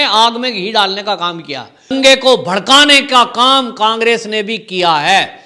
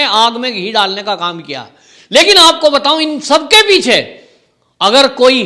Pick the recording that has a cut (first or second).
first